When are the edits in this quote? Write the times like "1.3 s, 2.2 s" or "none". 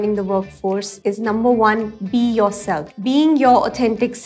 0.9 s, 2.9 s